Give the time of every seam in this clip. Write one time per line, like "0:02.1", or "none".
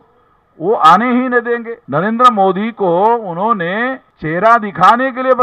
0:01.8
0:04.1